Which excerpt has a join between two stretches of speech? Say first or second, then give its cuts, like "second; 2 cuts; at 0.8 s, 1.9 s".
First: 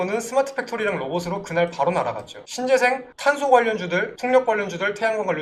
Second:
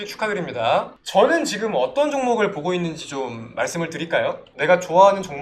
second; 2 cuts; at 1.0 s, 4.5 s